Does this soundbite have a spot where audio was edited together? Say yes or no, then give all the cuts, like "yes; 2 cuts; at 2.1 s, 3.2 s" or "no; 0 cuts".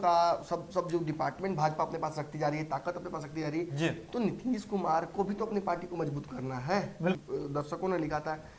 yes; 1 cut; at 7.2 s